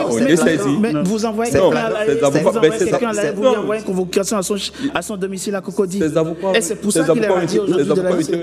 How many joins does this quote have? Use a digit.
0